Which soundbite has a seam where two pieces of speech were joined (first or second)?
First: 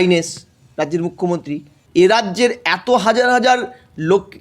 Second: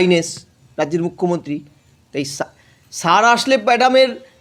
first